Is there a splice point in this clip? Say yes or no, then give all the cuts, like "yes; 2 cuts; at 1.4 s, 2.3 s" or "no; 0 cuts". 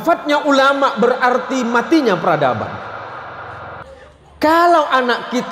yes; 1 cut; at 3.9 s